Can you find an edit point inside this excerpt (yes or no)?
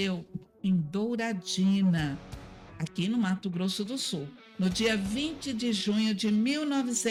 no